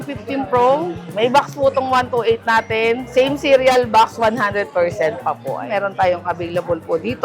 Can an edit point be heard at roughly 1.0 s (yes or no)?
yes